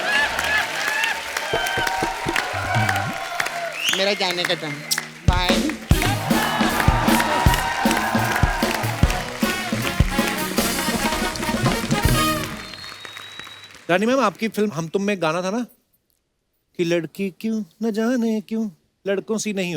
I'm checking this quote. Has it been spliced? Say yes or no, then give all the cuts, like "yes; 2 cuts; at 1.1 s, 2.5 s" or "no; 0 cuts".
no; 0 cuts